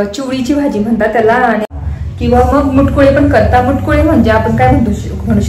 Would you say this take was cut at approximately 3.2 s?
no; 1 cut; at 1.8 s

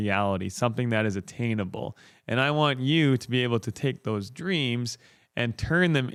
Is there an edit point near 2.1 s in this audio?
no; 0 cuts

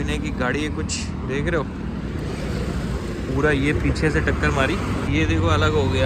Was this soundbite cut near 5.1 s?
yes; 1 cut; at 5.1 s

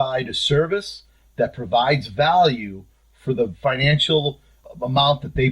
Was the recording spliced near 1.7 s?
no; 1 cut; at 4.6 s

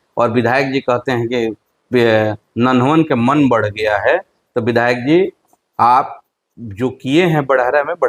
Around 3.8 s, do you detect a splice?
no; 0 cuts

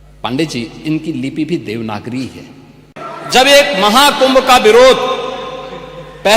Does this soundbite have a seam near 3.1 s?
yes; 1 cut; at 3.1 s

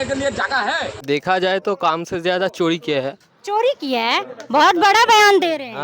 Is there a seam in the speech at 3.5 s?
no; 1 cut; at 1.0 s

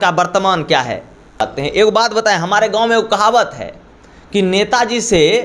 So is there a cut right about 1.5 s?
yes; 1 cut; at 1.5 s

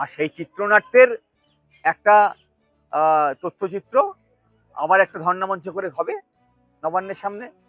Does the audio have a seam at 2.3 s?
no; 0 cuts

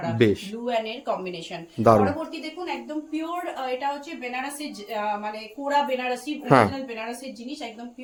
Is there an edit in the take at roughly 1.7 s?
no; 0 cuts

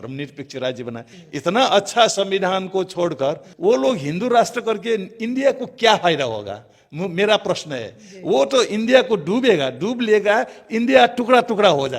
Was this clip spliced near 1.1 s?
yes; 1 cut; at 1.1 s

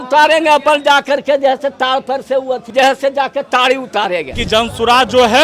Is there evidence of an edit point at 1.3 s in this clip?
no; 2 cuts; at 2.7 s, 4.4 s

